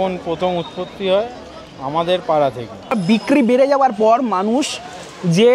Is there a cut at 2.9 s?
yes; 1 cut; at 2.9 s

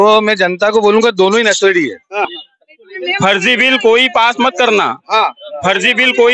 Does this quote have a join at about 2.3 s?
yes; 1 cut; at 2.3 s

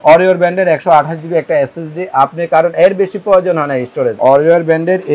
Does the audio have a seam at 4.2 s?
yes; 1 cut; at 4.2 s

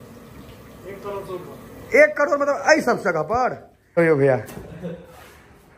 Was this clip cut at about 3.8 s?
yes; 1 cut; at 3.8 s

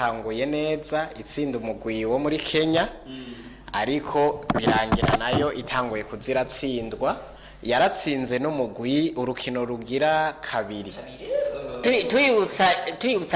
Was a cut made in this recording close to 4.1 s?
no; 1 cut; at 11.8 s

